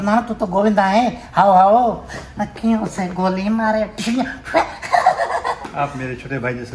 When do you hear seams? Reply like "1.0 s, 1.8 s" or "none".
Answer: none